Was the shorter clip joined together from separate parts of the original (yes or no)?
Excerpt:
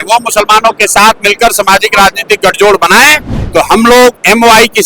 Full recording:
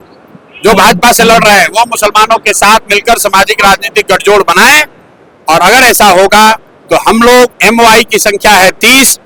yes